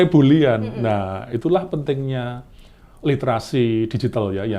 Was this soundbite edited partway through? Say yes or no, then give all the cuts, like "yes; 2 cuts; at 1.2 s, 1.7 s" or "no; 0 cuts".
no; 0 cuts